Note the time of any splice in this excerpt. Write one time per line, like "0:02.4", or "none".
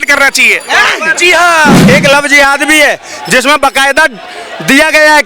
0:01.8